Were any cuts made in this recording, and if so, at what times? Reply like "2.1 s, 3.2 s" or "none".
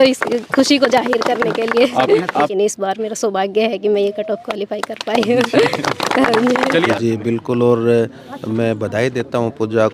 2.5 s, 6.9 s